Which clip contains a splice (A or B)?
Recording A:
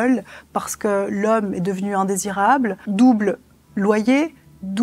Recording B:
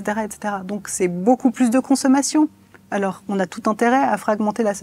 A